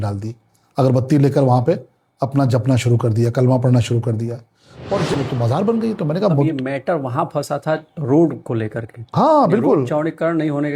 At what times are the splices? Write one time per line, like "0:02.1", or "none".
0:05.1